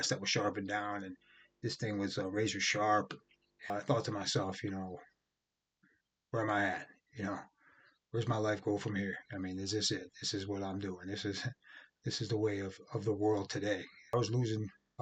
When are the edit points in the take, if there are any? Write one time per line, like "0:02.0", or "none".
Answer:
0:03.7
0:14.1